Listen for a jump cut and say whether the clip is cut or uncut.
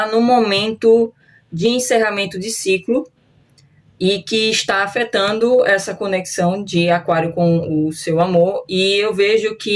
uncut